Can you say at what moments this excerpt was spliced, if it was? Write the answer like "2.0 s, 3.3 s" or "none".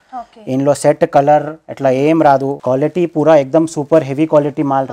2.6 s